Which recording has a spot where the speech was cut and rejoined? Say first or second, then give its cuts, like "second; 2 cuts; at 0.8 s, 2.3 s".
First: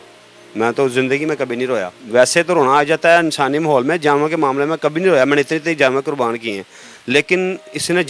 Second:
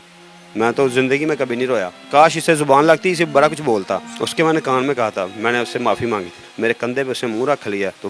second; 3 cuts; at 1.9 s, 4.1 s, 6.4 s